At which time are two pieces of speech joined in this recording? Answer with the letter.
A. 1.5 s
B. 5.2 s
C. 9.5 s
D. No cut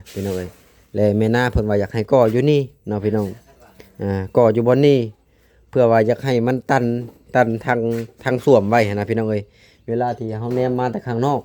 D